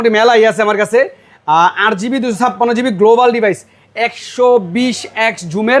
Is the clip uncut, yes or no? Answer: yes